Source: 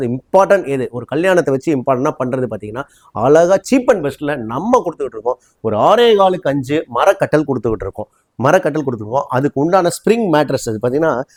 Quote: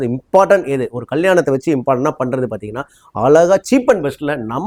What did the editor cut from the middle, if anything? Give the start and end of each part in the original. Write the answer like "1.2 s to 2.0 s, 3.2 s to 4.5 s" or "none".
none